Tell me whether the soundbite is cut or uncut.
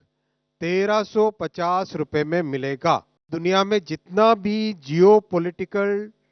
cut